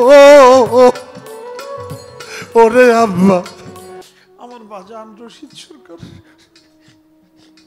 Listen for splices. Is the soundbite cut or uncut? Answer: cut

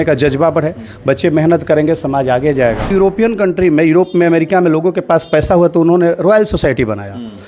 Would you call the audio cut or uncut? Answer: cut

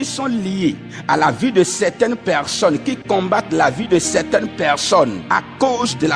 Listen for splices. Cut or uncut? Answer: cut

